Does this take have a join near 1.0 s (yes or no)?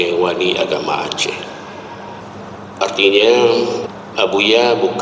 no